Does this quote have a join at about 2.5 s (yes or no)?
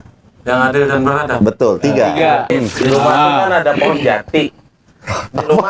yes